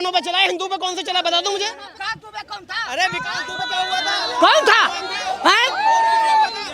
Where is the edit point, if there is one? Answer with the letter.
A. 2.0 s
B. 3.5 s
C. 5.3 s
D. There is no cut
A